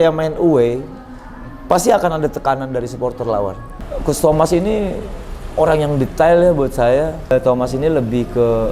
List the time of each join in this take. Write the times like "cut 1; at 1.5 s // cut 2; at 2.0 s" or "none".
cut 1; at 3.7 s // cut 2; at 7.3 s

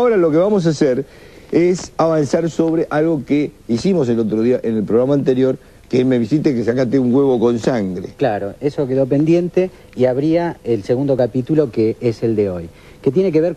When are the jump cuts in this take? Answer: cut 1; at 12.2 s

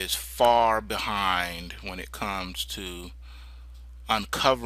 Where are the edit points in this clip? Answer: cut 1; at 3.0 s

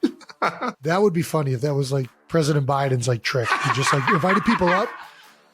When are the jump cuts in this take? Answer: cut 1; at 0.8 s // cut 2; at 2.2 s

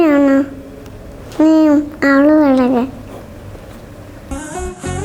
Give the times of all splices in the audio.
none

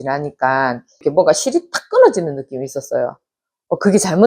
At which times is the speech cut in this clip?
cut 1; at 1.0 s

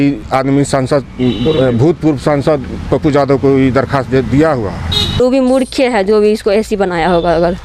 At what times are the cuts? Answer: cut 1; at 5.2 s

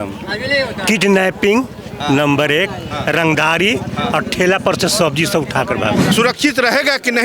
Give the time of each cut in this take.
cut 1; at 6.1 s

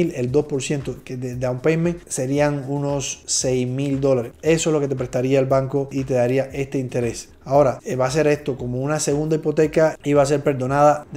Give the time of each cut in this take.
none

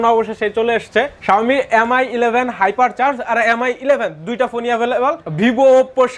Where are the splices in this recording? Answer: cut 1; at 1.2 s // cut 2; at 5.3 s

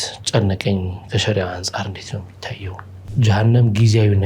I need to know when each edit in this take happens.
cut 1; at 3.0 s

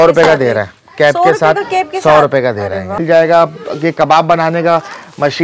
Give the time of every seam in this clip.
cut 1; at 3.0 s

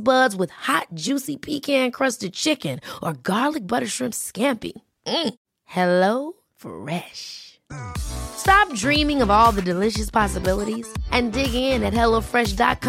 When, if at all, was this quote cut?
none

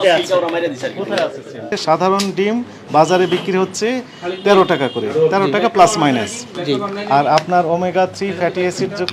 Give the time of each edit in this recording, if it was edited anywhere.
cut 1; at 1.8 s

